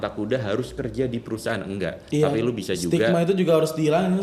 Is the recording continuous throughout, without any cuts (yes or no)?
yes